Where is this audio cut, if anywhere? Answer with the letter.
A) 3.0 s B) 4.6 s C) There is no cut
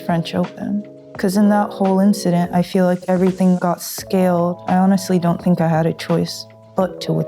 B